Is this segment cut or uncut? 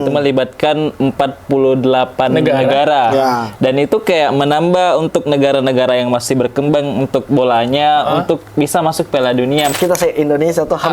cut